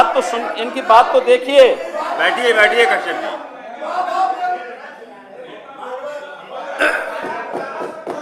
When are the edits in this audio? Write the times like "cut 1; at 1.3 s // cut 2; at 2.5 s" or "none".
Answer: none